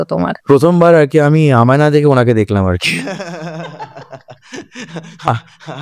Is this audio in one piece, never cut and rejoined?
yes; 0 cuts

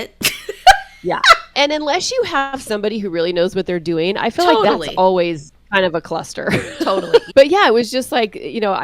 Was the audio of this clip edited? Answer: yes; 2 cuts; at 1.5 s, 7.3 s

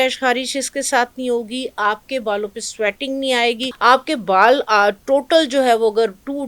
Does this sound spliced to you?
yes; 1 cut; at 3.7 s

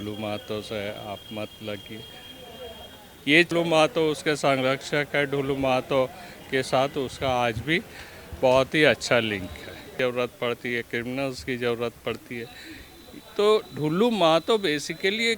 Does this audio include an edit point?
yes; 2 cuts; at 3.5 s, 10.0 s

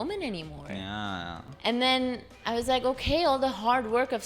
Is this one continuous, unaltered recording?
no; 1 cut; at 1.5 s

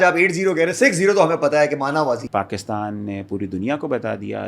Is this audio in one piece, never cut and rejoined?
no; 1 cut; at 2.2 s

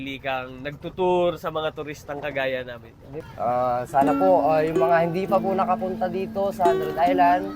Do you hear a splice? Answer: yes; 1 cut; at 3.4 s

